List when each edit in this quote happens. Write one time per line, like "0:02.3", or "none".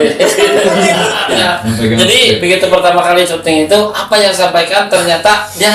0:01.3